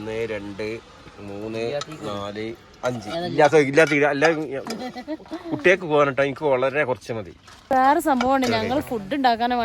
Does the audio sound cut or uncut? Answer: cut